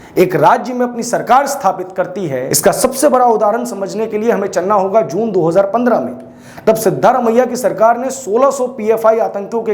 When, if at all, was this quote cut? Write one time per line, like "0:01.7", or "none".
0:02.5